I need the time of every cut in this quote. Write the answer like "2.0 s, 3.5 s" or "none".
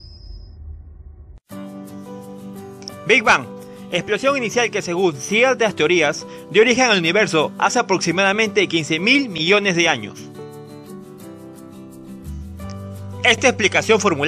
1.3 s

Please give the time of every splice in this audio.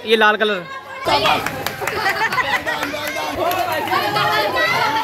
1.0 s, 3.4 s

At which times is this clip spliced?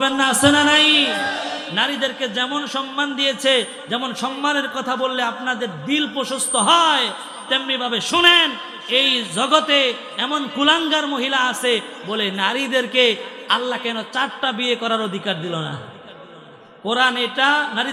none

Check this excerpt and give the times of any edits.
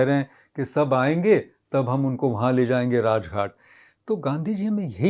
none

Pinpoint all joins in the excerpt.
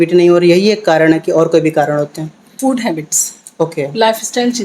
2.4 s

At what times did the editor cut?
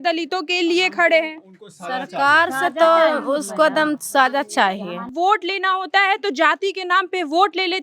5.1 s

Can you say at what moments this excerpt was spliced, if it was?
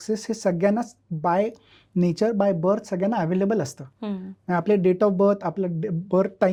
none

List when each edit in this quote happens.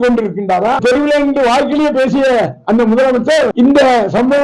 0.8 s, 3.5 s

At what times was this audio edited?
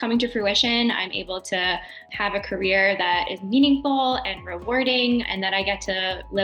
2.0 s, 5.3 s

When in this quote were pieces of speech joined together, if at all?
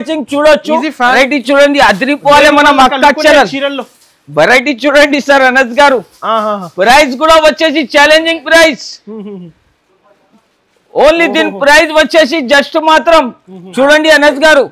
1.1 s

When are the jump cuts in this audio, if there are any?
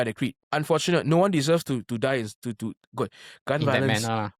none

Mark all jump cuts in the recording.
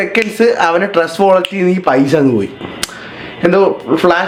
none

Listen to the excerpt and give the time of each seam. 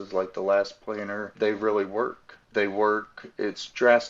1.3 s, 2.5 s

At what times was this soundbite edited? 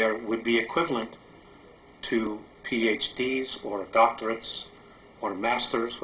none

